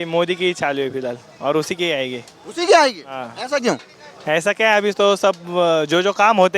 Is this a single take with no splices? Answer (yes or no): yes